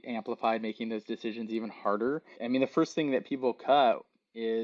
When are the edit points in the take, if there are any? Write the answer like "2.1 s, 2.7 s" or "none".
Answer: 2.3 s